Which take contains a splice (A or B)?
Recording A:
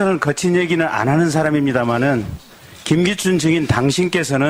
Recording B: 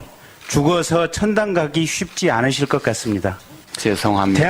B